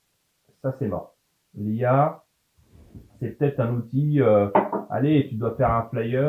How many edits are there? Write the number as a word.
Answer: zero